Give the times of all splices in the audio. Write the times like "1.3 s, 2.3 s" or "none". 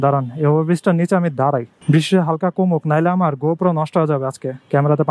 none